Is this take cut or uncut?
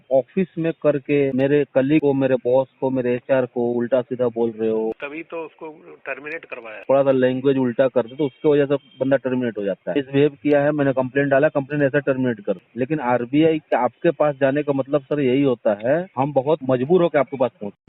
cut